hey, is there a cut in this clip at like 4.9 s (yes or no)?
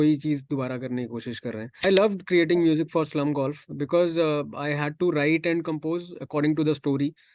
no